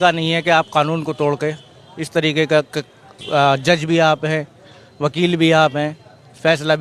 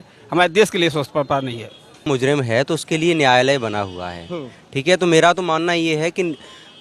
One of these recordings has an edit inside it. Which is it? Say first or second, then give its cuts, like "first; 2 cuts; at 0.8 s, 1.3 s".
second; 1 cut; at 2.0 s